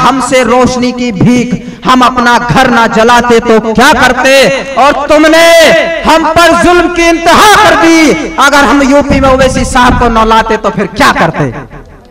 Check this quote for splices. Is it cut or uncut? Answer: uncut